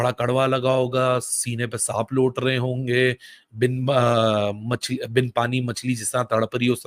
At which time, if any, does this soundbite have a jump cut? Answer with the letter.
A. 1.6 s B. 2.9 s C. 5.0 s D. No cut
C